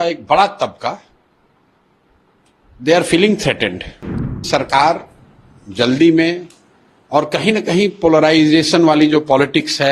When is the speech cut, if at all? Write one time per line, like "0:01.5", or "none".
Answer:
0:04.4